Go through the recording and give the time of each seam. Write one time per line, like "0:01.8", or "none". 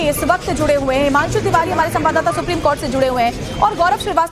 0:02.3